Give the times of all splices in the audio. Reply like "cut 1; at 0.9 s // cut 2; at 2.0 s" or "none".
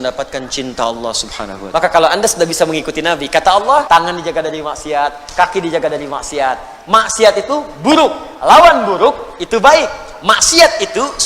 cut 1; at 1.5 s // cut 2; at 3.8 s